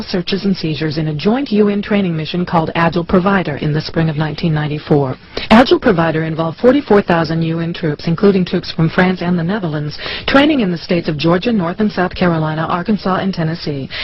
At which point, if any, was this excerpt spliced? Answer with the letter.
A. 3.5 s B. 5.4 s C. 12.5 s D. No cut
A